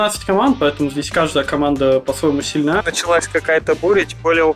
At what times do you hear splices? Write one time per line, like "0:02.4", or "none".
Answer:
0:02.8

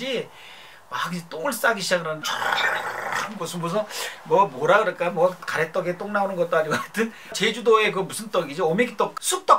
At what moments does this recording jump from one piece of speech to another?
0:02.2

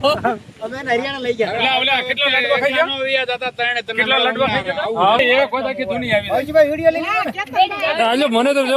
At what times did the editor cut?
0:05.2

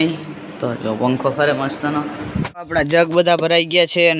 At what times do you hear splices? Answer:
0:02.5

